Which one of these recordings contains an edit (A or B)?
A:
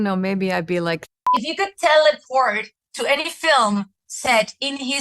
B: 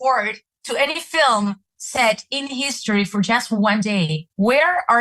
A